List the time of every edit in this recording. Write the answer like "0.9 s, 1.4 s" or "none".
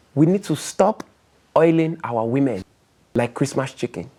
none